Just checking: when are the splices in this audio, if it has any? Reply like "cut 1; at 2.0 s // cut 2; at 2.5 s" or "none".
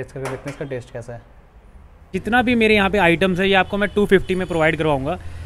cut 1; at 2.1 s